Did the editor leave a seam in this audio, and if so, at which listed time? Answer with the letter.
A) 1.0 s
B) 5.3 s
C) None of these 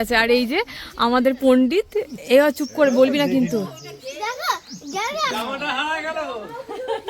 B